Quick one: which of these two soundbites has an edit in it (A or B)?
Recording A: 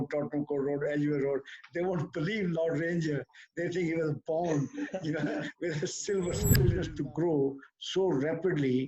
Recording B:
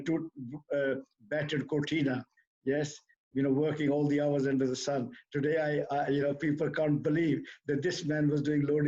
A